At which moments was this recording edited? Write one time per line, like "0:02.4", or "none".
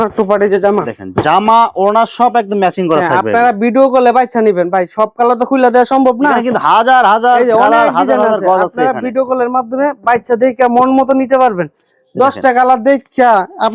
none